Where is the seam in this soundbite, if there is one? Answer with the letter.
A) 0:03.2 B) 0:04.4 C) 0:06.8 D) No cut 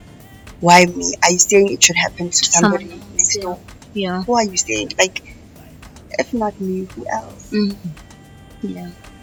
D